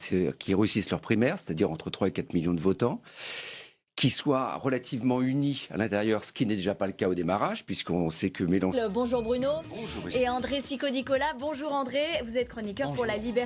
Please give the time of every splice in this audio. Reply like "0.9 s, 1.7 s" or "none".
none